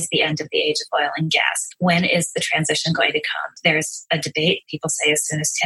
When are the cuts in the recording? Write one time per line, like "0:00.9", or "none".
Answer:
0:01.6
0:03.5